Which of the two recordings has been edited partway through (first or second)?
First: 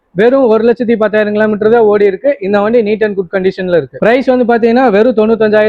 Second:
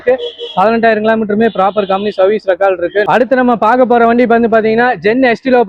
second